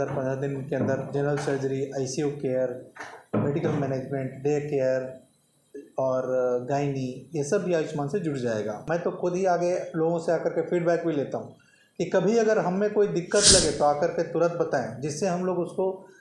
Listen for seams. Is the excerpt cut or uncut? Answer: cut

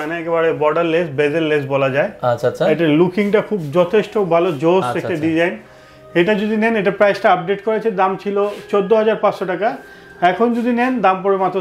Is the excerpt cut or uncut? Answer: uncut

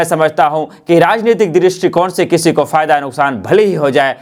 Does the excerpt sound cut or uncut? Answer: uncut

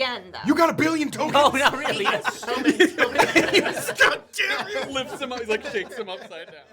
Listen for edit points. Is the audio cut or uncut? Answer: uncut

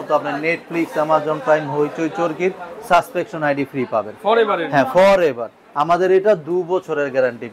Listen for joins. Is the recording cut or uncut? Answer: uncut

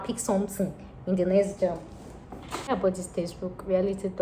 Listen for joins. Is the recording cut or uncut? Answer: cut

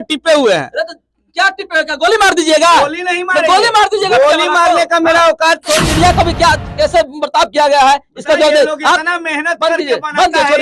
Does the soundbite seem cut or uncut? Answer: cut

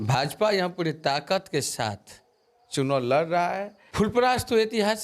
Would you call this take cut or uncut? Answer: cut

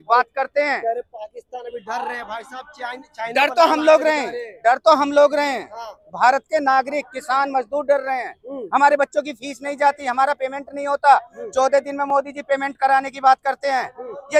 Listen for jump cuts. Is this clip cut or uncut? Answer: uncut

